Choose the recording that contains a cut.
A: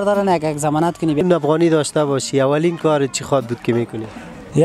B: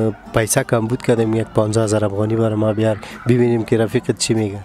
A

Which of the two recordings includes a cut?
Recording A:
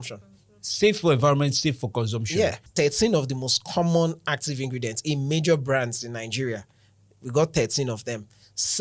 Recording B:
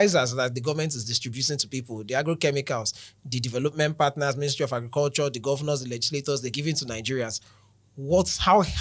A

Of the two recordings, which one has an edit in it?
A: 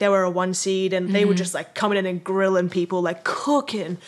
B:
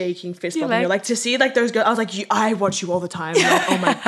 B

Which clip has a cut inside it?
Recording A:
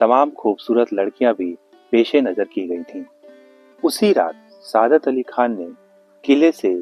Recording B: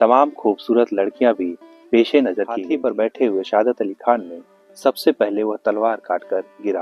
B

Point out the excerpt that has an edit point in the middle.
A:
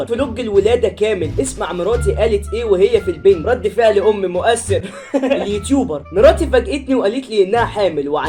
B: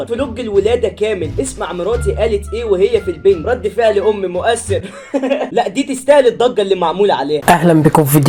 A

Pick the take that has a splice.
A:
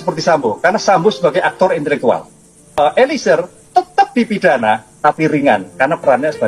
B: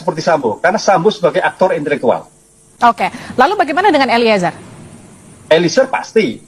A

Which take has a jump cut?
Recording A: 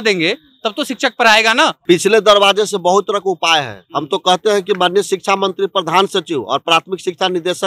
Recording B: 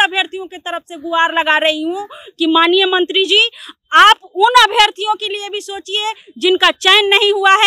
A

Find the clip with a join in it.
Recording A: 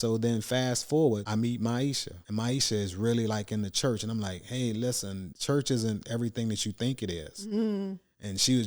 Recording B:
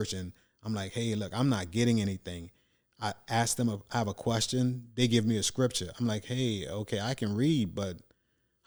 A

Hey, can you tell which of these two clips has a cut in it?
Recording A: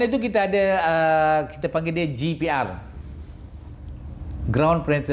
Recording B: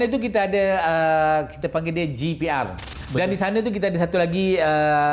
B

